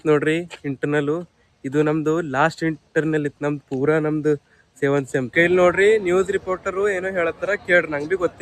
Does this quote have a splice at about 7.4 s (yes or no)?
no